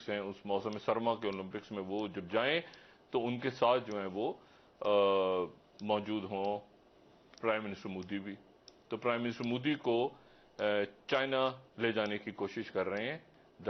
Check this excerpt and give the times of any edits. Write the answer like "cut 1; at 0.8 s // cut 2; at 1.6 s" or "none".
none